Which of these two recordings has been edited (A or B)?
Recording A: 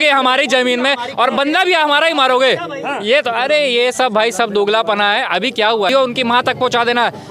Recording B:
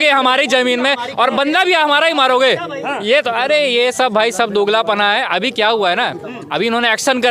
A